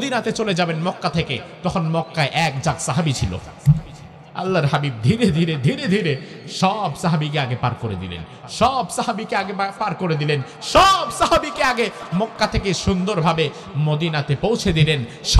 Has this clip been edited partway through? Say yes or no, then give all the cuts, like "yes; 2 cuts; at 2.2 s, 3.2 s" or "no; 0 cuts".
no; 0 cuts